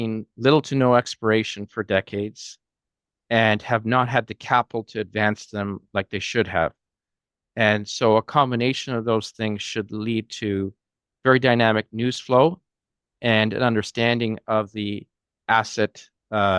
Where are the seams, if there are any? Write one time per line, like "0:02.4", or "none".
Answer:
none